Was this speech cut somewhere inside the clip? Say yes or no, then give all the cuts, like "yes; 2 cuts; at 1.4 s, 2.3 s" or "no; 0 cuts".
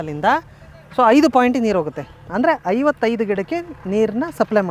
no; 0 cuts